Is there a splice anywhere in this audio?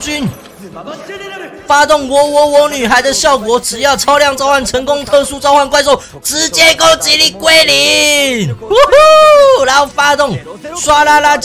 no; 0 cuts

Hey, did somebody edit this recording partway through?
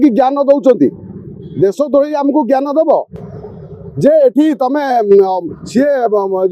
no; 0 cuts

